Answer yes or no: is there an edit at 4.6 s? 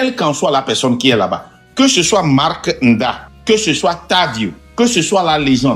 yes